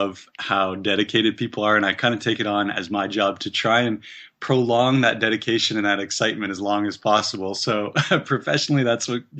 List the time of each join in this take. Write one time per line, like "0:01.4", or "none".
none